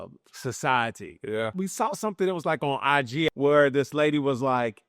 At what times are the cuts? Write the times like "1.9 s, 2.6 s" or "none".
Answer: 1.5 s, 3.3 s